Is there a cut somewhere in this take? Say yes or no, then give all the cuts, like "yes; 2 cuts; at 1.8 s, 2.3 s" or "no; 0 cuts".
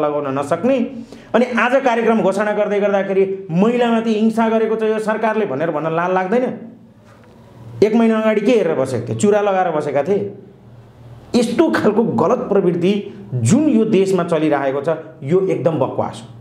no; 0 cuts